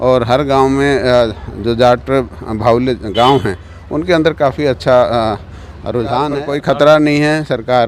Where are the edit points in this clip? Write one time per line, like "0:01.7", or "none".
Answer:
0:06.4